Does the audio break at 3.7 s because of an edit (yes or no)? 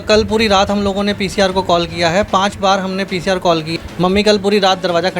yes